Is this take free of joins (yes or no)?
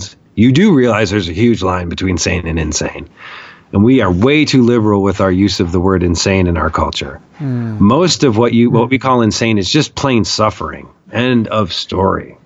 yes